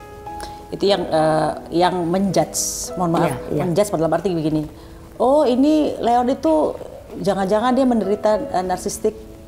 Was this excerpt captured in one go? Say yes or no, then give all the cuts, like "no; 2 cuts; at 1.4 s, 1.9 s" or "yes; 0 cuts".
yes; 0 cuts